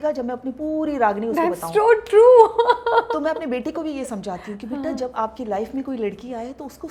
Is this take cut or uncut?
uncut